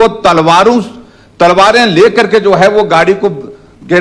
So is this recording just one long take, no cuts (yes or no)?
yes